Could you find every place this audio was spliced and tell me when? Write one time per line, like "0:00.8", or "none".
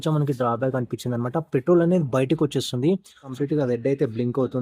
0:03.3